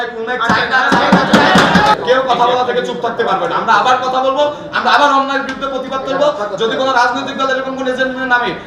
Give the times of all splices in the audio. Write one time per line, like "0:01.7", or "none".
0:01.9